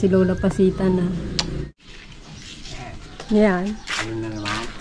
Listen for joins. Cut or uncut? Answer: cut